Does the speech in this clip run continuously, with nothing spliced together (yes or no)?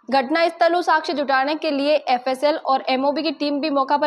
yes